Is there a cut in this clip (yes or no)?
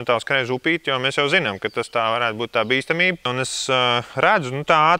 no